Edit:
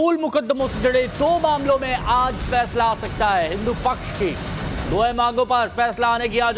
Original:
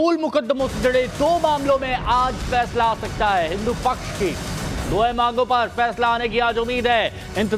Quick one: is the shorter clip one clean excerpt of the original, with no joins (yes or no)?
yes